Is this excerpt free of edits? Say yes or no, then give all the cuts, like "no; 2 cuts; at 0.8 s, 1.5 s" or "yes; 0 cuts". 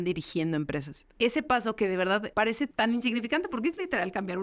no; 1 cut; at 2.7 s